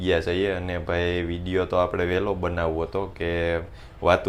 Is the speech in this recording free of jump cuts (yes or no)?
yes